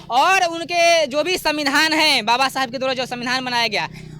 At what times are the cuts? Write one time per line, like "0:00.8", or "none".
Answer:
none